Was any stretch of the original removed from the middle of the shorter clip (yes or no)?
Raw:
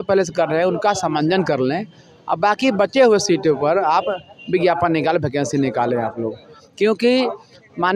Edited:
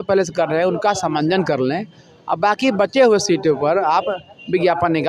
no